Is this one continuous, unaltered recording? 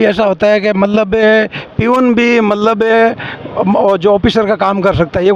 yes; 0 cuts

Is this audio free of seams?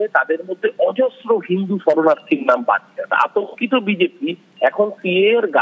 no; 1 cut; at 3.1 s

